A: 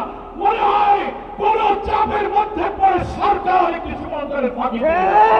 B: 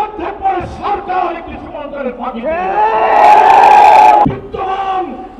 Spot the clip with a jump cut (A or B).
B